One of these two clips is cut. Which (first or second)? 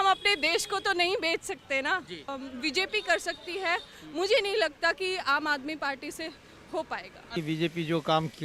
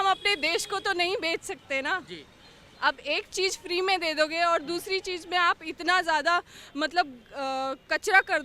first